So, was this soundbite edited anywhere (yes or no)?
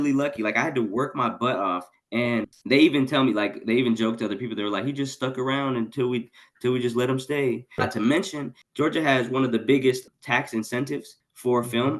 yes